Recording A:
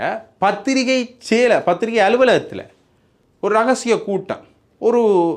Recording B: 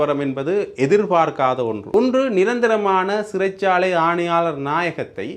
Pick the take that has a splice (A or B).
B